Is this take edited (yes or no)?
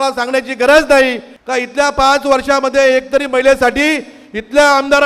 yes